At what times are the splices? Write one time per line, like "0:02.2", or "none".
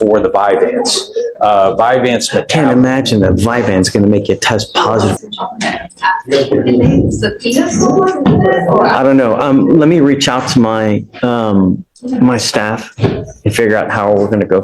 0:05.1